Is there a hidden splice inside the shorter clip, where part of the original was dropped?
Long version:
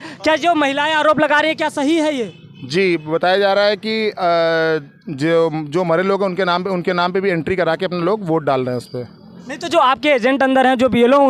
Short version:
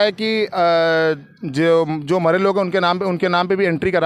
no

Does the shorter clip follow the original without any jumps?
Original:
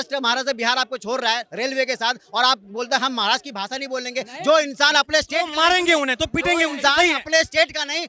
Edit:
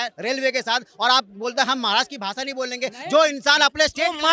yes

